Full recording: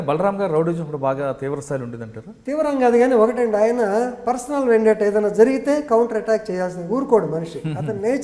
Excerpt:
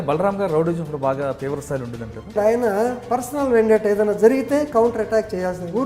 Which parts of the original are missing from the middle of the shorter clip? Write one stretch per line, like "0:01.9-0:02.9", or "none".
0:02.3-0:03.5